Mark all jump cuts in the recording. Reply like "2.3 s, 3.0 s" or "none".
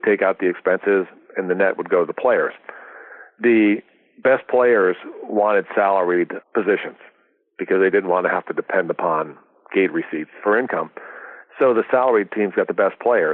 6.4 s, 10.3 s